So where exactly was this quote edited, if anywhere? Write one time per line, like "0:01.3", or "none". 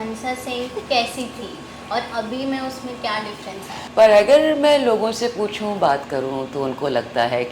0:03.8